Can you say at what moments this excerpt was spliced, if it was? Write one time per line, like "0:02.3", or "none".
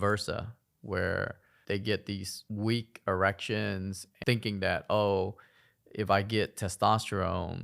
0:01.5
0:04.1